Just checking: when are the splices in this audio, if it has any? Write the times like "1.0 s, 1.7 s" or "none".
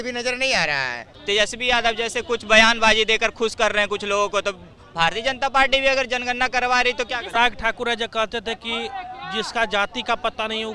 1.1 s, 7.3 s

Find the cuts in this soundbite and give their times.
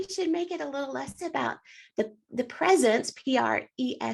none

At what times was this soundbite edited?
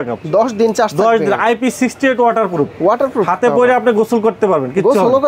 none

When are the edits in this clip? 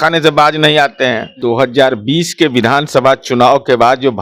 1.3 s

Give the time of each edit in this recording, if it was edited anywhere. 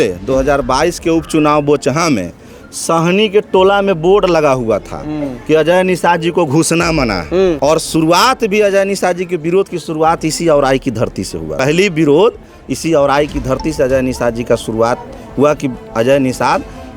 7.6 s, 11.6 s

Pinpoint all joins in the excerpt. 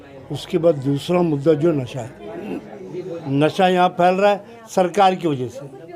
3.1 s

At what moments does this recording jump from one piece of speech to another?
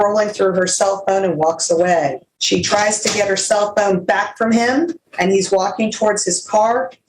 2.3 s, 5.0 s

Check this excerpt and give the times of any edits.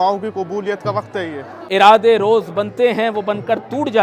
1.5 s

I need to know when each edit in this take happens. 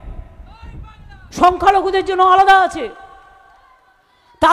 none

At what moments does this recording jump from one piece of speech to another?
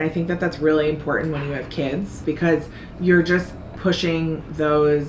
2.2 s

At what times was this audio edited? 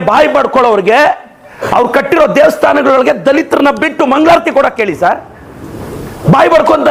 none

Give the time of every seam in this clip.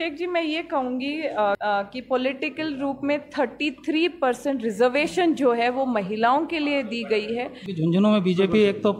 1.6 s, 7.6 s

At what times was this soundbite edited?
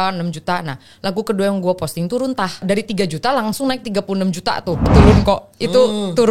2.6 s, 4.9 s

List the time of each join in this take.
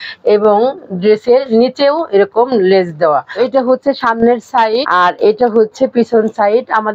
3.4 s, 4.9 s

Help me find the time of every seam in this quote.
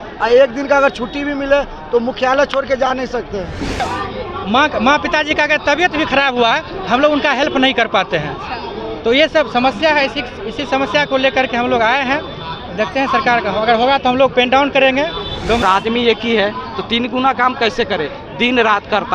3.8 s, 15.6 s

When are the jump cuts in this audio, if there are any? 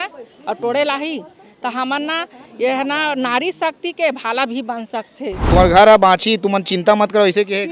5.4 s

